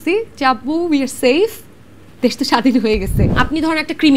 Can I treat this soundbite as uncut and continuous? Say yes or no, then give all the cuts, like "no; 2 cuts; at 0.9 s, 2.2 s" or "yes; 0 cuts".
no; 1 cut; at 3.3 s